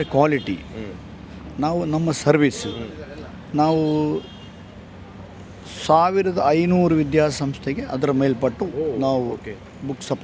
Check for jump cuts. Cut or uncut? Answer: uncut